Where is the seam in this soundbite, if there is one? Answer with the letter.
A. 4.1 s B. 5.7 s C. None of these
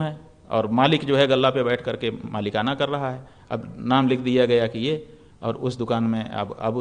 C